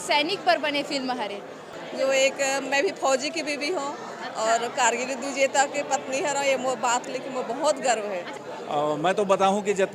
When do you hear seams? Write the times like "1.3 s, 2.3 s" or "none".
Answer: 1.7 s, 8.4 s